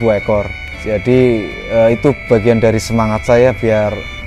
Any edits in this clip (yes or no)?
no